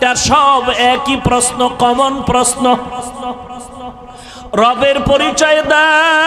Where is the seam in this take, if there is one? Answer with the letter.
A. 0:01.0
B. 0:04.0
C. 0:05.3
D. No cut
D